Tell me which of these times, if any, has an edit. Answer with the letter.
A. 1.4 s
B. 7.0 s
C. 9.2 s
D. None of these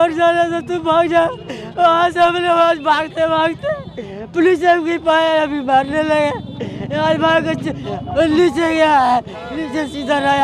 D